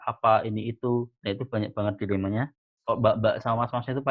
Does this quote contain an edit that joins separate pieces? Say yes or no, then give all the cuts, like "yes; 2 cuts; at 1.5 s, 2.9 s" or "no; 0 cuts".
yes; 1 cut; at 2.6 s